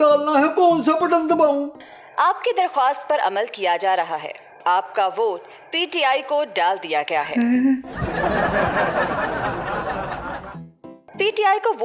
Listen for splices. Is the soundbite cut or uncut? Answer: uncut